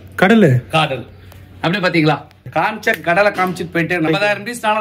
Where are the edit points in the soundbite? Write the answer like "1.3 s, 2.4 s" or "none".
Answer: 2.5 s, 4.1 s